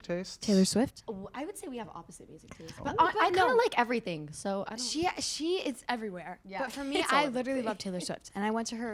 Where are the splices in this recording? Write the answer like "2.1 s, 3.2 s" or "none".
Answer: none